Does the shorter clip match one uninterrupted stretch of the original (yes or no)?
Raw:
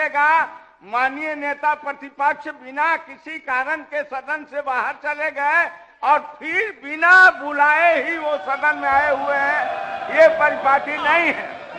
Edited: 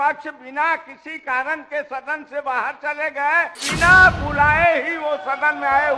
no